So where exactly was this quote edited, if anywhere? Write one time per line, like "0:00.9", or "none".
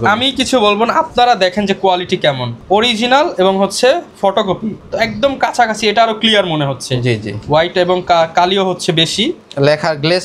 none